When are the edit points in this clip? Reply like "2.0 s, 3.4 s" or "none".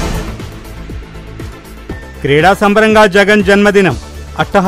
2.1 s